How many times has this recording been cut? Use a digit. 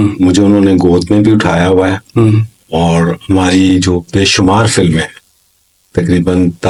0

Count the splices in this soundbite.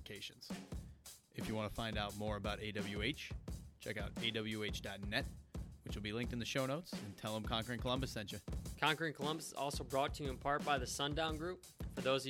1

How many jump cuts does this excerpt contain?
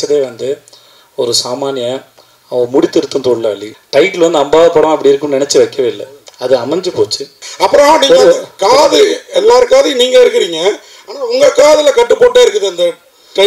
2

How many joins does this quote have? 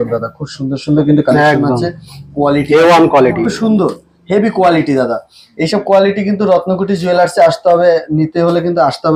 0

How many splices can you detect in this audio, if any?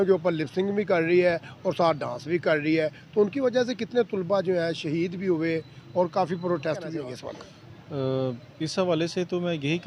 1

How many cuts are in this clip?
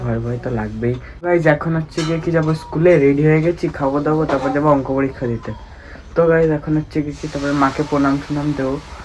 1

